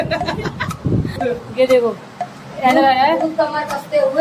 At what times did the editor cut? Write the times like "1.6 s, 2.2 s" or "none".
1.1 s